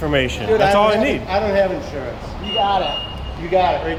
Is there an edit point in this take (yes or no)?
no